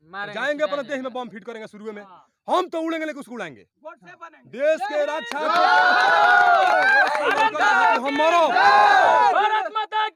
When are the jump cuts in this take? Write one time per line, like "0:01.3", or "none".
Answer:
none